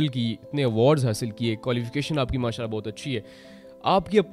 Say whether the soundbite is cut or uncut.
uncut